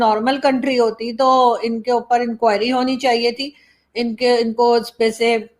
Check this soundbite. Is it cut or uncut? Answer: uncut